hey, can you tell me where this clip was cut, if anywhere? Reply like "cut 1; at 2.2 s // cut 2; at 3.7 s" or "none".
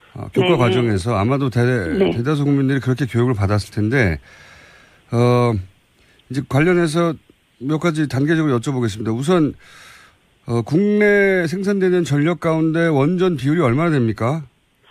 none